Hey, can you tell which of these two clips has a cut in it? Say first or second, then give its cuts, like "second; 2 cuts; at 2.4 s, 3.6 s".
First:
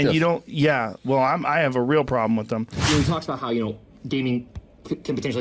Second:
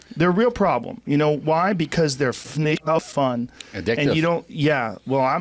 first; 1 cut; at 2.7 s